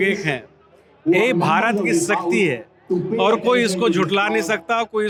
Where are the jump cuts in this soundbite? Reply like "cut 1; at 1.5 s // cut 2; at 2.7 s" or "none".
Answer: none